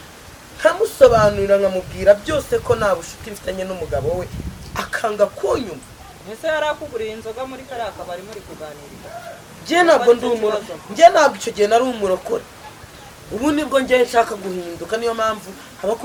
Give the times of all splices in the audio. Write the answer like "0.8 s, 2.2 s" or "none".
none